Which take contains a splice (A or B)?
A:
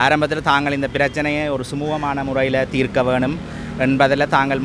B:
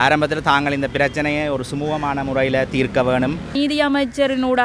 B